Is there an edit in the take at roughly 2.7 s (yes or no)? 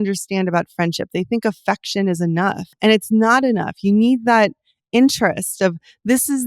yes